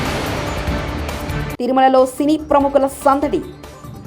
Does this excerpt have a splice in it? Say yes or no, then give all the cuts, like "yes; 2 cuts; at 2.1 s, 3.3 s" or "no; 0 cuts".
yes; 1 cut; at 1.5 s